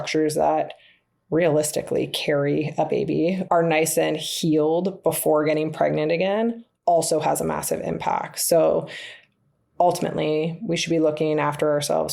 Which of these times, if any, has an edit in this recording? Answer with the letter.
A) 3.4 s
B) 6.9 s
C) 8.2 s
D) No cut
A